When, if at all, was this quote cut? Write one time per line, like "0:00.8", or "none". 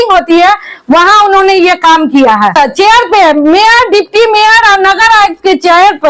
0:02.6